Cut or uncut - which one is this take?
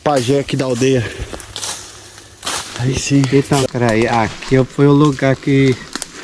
cut